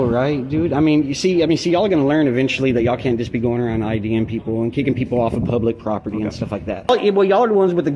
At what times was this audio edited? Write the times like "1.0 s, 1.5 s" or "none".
6.9 s